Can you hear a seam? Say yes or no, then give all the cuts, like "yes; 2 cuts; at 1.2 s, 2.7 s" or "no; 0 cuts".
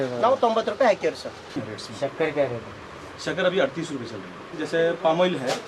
yes; 2 cuts; at 1.5 s, 4.5 s